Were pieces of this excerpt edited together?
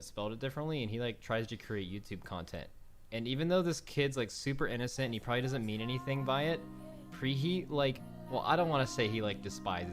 yes; 1 cut; at 8.1 s

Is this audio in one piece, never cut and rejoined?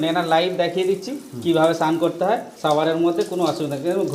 yes; 0 cuts

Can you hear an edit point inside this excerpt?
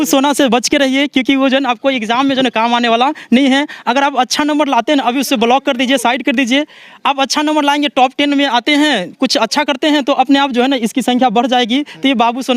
no; 0 cuts

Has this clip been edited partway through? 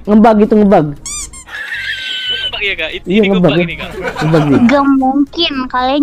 yes; 1 cut; at 2.5 s

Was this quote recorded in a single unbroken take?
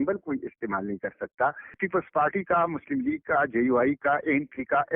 no; 1 cut; at 1.8 s

